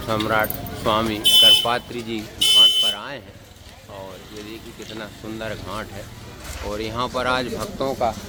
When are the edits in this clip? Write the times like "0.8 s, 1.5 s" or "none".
none

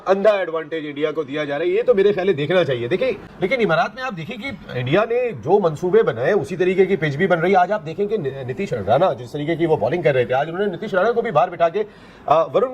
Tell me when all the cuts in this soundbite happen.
3.3 s

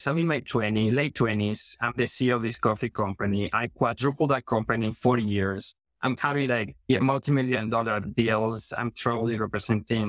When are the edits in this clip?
none

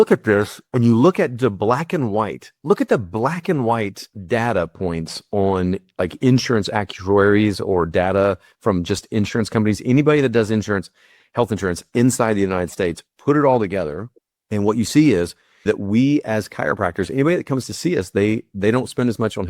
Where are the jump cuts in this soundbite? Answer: 15.6 s

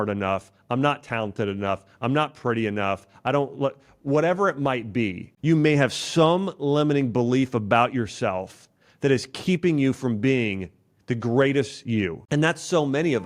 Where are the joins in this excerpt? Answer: 12.2 s

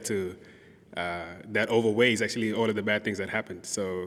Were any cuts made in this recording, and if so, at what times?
none

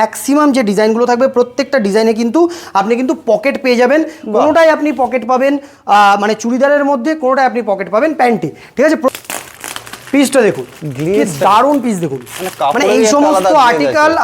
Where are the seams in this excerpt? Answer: 9.2 s

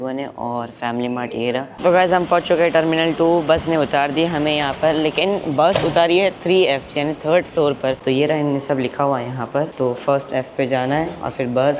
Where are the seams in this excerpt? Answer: 1.7 s, 8.0 s

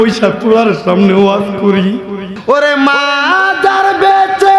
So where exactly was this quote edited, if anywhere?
2.3 s

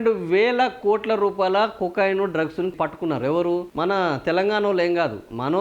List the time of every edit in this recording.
2.7 s

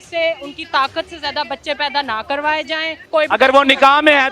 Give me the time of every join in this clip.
3.1 s

